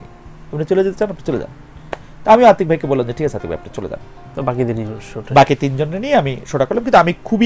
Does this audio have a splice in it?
no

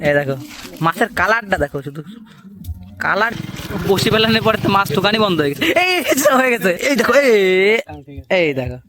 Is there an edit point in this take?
yes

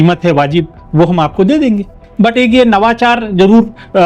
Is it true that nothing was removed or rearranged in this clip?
no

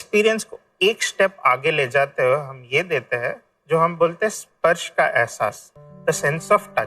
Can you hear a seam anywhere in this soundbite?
no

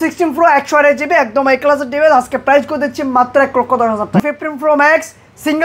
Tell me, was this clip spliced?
yes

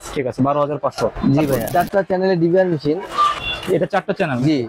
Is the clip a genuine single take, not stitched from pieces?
no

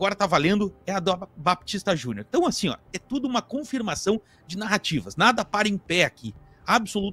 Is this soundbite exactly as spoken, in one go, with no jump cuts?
yes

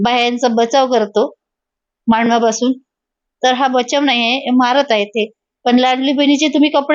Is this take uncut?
no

